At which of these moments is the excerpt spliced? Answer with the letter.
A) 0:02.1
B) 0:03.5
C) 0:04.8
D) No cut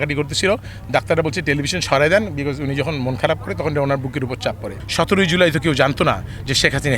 C